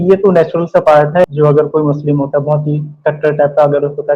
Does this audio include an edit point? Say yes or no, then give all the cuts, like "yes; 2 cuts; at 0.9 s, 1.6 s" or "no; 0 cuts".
yes; 1 cut; at 1.2 s